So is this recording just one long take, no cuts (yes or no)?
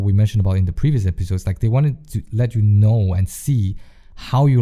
yes